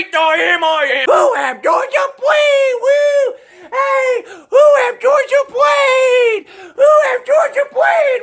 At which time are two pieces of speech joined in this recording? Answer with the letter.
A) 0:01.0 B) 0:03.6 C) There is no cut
A